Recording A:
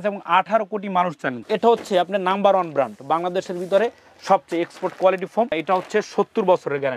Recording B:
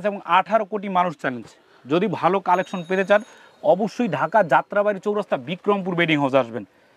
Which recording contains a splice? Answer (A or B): A